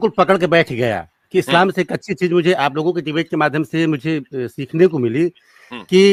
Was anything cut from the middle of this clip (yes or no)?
no